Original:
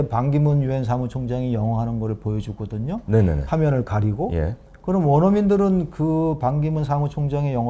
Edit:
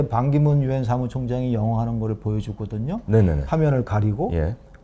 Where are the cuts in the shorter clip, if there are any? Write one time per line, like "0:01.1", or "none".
none